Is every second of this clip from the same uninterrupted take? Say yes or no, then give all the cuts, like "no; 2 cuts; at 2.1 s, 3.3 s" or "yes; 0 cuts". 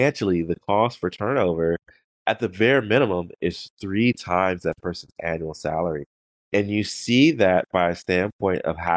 yes; 0 cuts